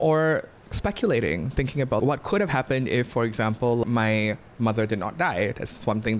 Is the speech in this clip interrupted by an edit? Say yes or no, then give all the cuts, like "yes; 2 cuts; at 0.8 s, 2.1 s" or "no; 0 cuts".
yes; 2 cuts; at 2.0 s, 3.8 s